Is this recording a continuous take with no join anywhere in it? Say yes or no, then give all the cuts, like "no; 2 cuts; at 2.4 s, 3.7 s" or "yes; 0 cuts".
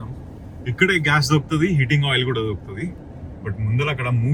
yes; 0 cuts